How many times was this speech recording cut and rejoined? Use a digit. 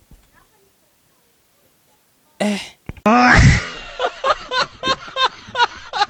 0